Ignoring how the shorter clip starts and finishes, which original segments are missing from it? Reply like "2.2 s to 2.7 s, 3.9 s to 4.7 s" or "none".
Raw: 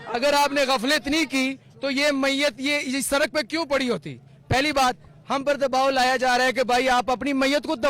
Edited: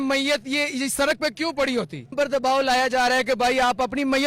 4.3 s to 5.4 s